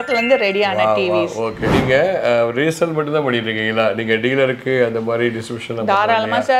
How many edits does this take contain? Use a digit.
1